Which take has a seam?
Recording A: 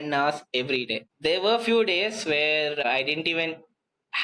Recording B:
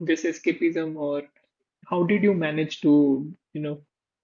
A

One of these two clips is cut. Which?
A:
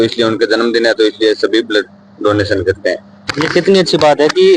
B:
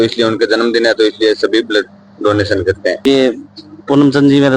B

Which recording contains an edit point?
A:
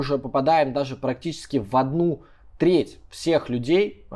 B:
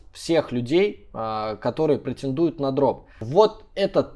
B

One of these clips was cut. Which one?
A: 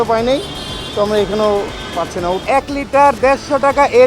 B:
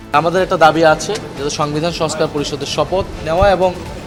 A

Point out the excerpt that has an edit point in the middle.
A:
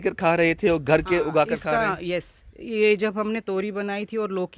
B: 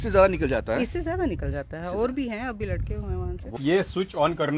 B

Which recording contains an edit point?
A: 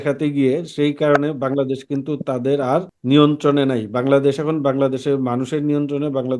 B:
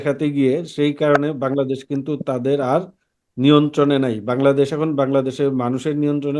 A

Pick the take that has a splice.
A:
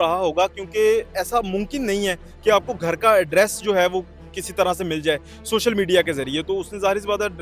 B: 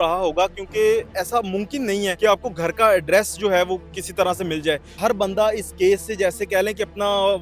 B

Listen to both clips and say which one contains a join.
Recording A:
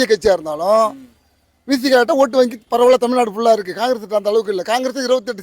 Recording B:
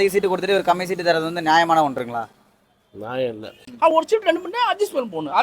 B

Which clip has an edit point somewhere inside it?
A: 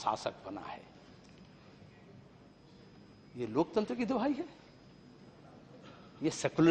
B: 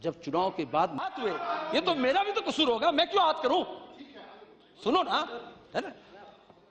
B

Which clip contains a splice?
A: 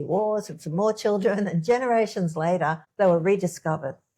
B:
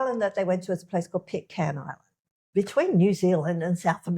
B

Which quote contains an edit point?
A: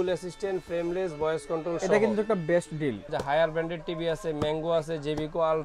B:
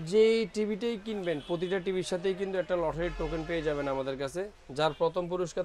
A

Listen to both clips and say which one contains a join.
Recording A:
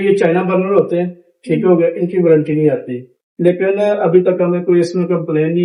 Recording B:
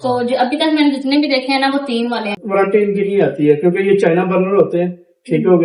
B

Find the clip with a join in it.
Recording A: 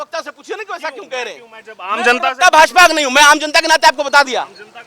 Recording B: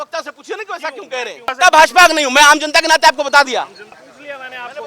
B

